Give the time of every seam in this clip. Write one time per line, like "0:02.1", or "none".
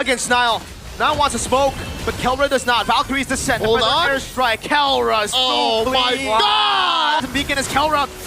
0:07.2